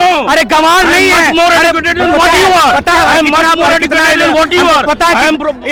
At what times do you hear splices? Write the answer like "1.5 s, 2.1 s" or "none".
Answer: none